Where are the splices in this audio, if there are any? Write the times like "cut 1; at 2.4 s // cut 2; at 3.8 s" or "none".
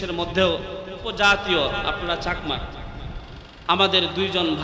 cut 1; at 1.0 s